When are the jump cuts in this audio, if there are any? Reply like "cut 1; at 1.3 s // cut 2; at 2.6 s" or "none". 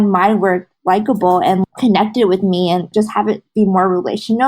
cut 1; at 1.6 s // cut 2; at 2.9 s

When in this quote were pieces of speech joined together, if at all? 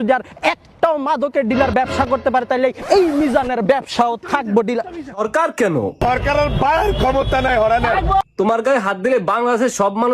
cut 1; at 5.2 s

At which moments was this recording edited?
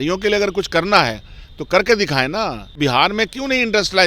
cut 1; at 2.8 s

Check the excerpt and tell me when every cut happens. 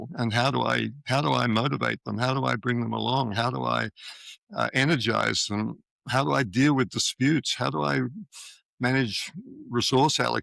none

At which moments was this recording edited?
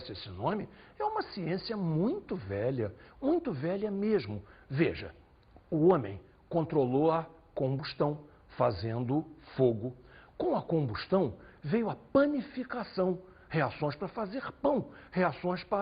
cut 1; at 2.4 s

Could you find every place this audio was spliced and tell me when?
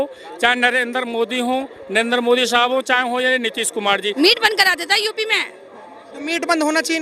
cut 1; at 4.1 s

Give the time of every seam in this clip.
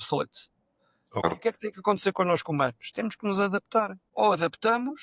cut 1; at 1.2 s // cut 2; at 4.0 s

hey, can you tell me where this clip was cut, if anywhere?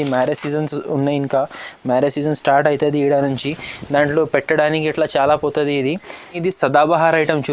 cut 1; at 6.4 s

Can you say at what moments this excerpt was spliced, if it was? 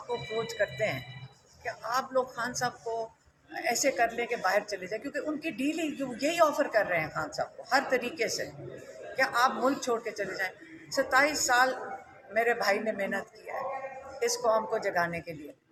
none

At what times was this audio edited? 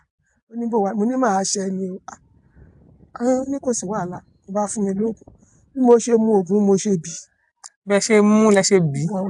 none

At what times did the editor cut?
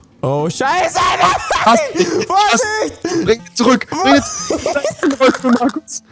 none

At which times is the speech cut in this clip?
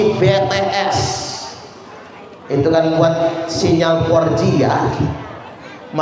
none

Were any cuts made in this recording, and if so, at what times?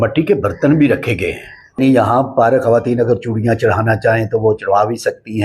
cut 1; at 1.8 s

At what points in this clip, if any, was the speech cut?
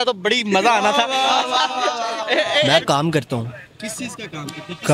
cut 1; at 2.8 s

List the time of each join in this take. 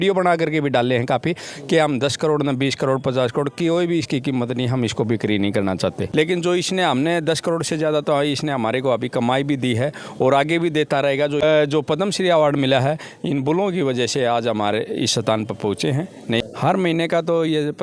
cut 1; at 6.0 s // cut 2; at 11.4 s // cut 3; at 16.4 s

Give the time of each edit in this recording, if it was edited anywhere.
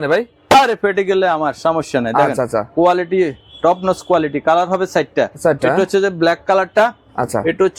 none

